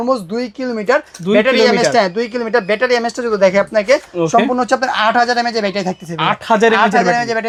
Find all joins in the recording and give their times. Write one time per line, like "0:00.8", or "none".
none